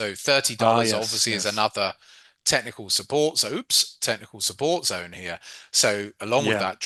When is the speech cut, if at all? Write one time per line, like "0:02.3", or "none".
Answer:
none